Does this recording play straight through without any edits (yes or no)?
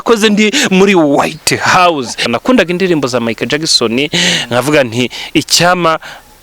no